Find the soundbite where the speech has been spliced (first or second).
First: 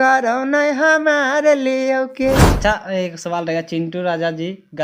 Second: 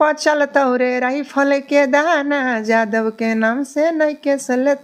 first